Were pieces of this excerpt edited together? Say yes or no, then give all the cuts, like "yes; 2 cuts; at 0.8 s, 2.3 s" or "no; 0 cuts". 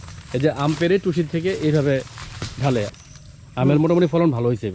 yes; 1 cut; at 2.9 s